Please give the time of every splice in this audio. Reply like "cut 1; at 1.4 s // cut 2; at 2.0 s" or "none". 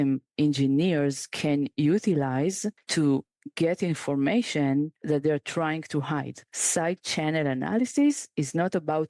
cut 1; at 2.7 s // cut 2; at 5.0 s // cut 3; at 6.4 s

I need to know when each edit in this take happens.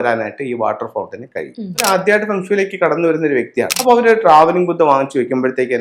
cut 1; at 1.8 s // cut 2; at 3.7 s

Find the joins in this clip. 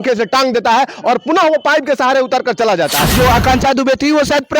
cut 1; at 3.1 s

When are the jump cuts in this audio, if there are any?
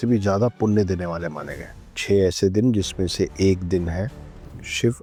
none

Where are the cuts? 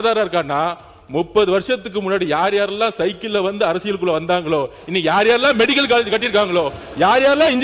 none

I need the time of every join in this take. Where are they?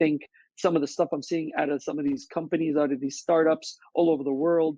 none

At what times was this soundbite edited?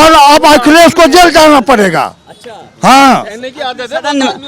none

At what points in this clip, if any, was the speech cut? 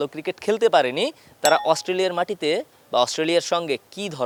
none

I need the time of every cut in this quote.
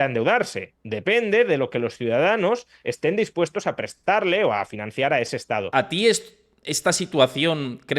cut 1; at 5.7 s

